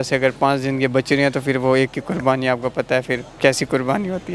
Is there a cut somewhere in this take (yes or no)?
yes